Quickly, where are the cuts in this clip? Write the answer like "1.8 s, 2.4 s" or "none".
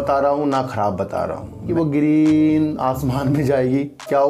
1.7 s